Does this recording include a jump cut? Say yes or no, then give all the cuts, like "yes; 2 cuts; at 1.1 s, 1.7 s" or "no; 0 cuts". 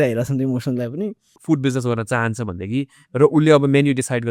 yes; 1 cut; at 1.3 s